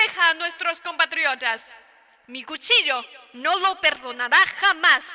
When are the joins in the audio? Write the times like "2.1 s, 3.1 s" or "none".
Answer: none